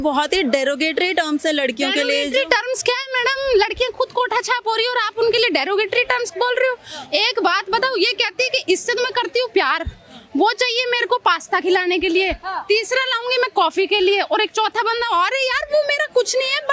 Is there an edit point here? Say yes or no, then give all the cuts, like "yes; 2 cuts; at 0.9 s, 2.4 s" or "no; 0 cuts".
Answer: no; 0 cuts